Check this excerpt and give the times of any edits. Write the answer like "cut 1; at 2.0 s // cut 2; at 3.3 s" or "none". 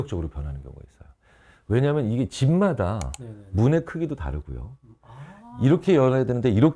none